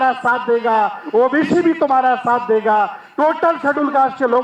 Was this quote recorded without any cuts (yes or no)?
yes